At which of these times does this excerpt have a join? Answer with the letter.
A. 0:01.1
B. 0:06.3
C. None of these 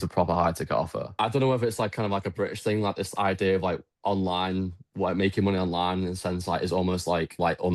A